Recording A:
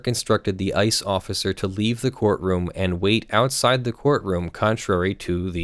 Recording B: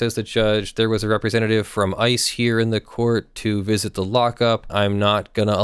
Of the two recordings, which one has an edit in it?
B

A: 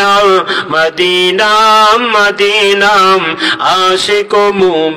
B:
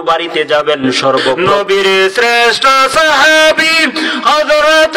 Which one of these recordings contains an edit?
B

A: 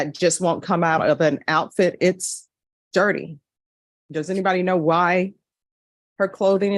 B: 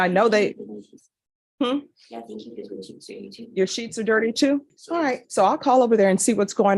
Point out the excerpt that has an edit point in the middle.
B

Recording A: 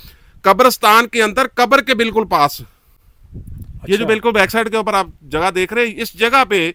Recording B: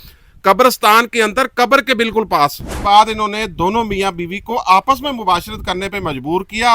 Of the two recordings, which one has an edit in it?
B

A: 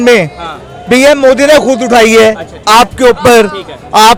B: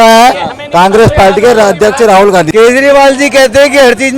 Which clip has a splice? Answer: B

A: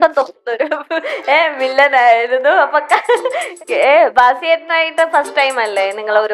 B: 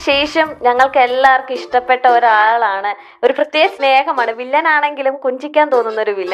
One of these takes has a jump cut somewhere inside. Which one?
A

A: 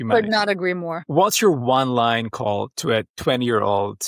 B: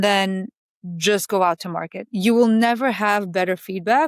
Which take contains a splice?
A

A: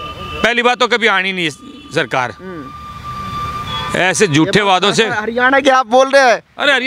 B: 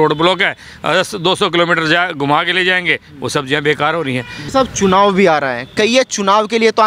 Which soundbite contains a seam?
B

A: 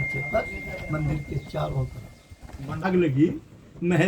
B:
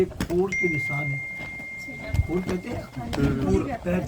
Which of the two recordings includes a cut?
A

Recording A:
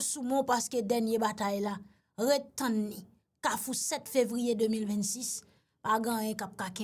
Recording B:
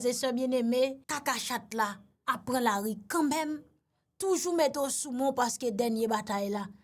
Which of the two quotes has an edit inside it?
B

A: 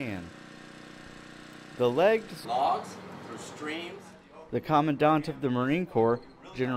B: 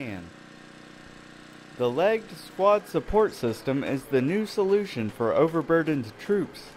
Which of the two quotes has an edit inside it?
B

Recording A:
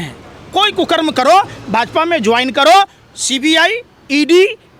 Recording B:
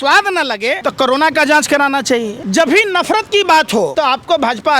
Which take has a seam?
B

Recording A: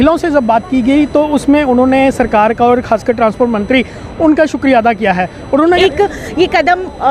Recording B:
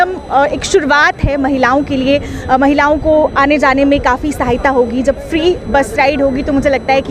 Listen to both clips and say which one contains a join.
A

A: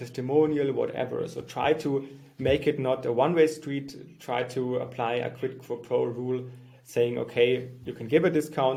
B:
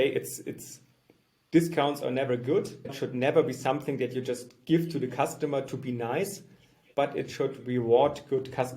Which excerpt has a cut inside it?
B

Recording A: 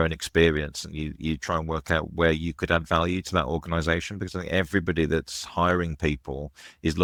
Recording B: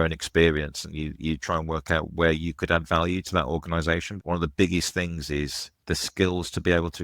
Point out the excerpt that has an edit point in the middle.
B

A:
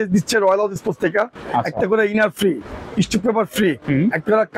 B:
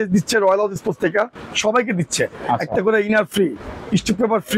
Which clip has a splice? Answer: A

